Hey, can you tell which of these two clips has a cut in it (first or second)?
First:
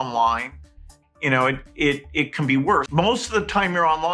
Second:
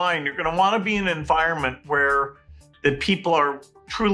first